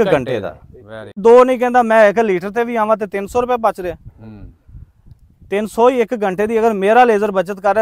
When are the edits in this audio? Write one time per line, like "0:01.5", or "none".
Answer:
0:01.2